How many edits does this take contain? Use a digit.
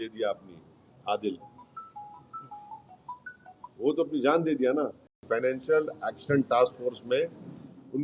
1